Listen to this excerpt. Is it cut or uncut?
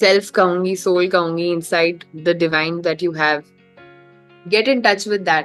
uncut